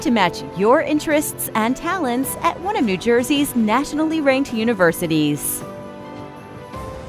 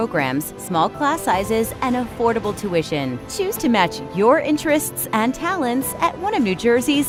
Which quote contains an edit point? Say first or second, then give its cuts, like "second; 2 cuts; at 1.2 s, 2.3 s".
first; 1 cut; at 5.4 s